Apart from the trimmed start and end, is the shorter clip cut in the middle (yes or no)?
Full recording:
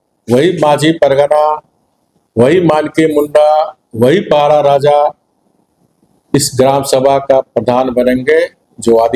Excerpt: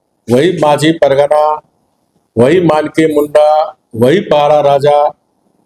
no